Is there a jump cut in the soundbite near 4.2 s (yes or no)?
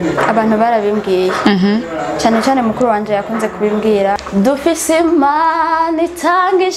yes